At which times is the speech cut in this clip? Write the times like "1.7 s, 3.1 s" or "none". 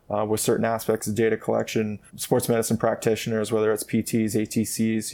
2.1 s